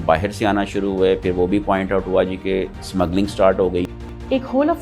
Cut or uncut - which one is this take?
cut